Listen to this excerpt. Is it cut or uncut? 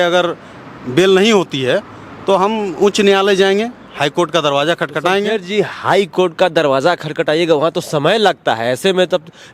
uncut